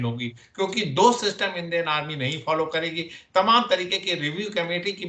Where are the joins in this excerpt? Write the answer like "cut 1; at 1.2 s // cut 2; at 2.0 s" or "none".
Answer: none